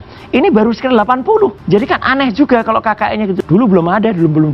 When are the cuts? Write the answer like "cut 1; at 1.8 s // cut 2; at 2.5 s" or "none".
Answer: cut 1; at 1.6 s // cut 2; at 3.4 s